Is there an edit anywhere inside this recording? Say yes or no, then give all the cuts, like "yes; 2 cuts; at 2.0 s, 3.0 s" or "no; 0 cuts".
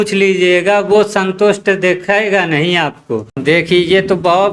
yes; 1 cut; at 3.4 s